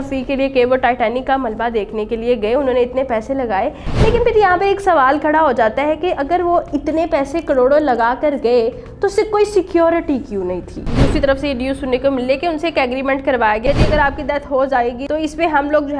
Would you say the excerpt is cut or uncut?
uncut